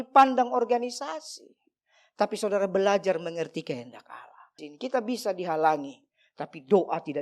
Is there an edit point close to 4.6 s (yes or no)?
yes